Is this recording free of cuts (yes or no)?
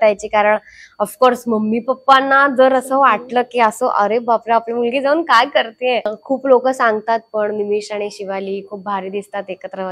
no